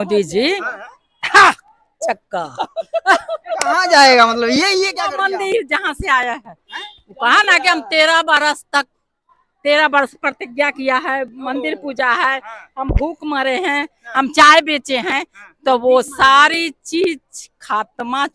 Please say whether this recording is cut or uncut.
uncut